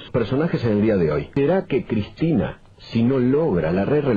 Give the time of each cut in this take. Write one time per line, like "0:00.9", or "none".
0:01.3